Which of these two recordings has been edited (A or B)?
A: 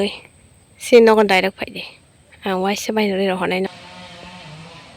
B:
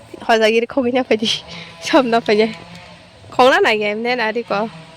A